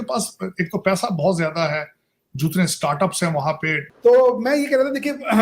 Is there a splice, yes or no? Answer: no